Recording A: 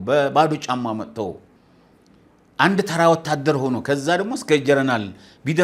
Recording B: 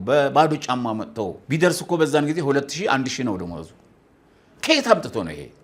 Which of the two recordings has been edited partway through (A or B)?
B